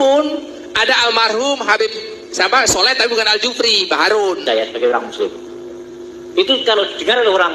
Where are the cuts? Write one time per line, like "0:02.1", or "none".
0:04.4